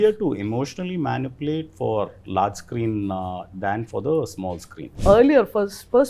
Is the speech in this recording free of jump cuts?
no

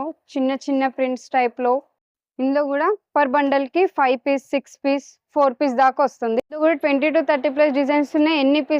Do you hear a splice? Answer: yes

